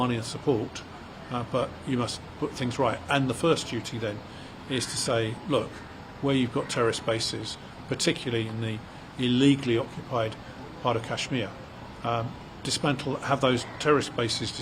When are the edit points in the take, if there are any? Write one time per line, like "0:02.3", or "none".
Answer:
none